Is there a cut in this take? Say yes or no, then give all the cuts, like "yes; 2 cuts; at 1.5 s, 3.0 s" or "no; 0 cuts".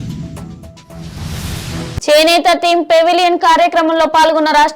yes; 1 cut; at 2.0 s